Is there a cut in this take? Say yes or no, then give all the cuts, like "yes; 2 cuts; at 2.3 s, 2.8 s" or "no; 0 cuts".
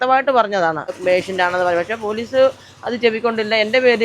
yes; 1 cut; at 1.0 s